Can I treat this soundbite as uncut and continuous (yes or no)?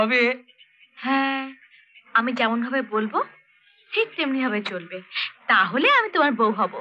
yes